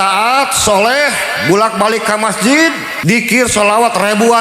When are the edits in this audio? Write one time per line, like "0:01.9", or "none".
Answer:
0:02.9